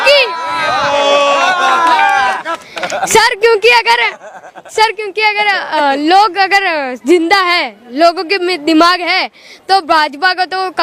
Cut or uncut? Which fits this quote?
uncut